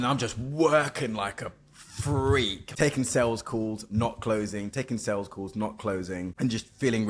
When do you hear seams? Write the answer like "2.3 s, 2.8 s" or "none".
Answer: 2.6 s, 6.3 s